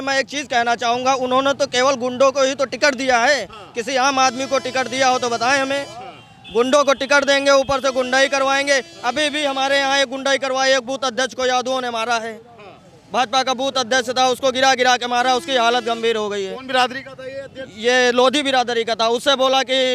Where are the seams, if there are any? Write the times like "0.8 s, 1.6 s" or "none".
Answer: none